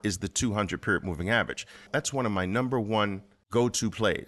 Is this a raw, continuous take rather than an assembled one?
no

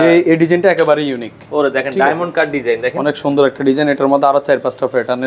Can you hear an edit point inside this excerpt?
no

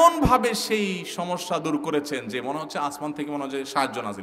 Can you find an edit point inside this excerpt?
no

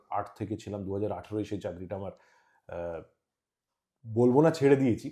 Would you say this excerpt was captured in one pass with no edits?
yes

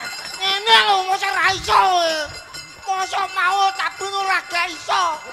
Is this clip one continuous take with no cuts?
yes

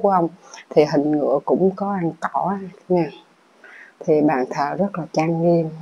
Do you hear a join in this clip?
no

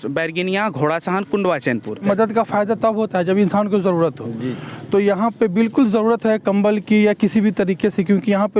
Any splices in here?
yes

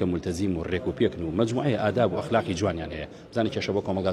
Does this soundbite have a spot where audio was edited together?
no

